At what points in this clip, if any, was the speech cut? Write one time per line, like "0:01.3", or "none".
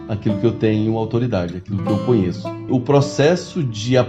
0:02.7